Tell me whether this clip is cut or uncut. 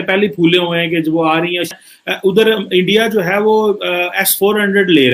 cut